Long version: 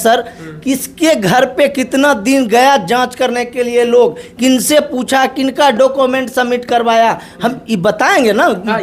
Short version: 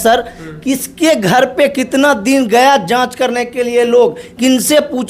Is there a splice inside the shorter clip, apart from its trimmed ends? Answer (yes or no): no